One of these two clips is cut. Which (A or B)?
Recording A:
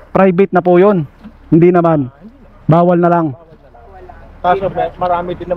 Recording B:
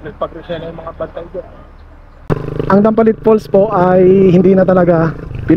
B